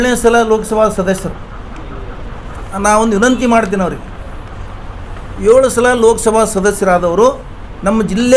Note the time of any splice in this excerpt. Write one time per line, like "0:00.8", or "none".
0:02.6

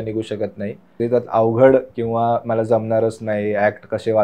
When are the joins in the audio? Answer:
0:00.9

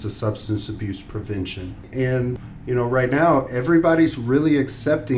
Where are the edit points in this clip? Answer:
none

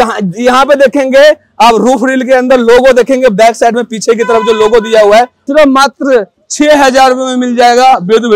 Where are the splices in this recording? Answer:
0:05.4

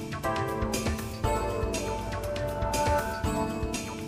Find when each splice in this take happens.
0:01.1

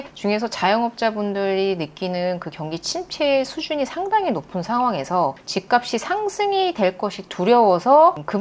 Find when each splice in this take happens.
none

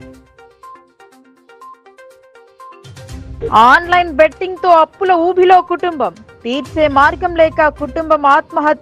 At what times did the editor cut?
0:01.2
0:02.0
0:03.3

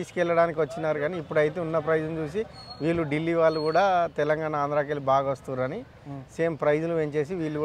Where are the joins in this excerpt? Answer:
none

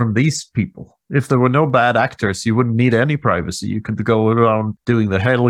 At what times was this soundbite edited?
none

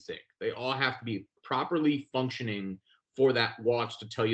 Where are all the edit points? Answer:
0:01.4

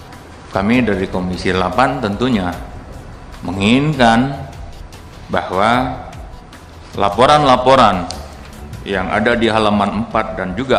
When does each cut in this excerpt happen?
none

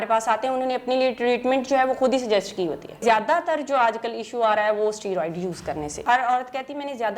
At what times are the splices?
0:03.0
0:06.0

